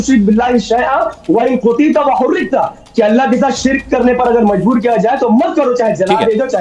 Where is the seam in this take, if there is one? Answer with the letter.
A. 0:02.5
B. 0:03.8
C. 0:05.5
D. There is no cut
D